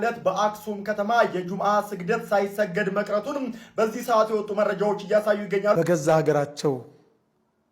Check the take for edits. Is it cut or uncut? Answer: cut